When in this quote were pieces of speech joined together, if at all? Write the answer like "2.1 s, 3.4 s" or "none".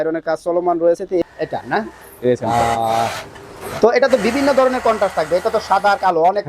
1.2 s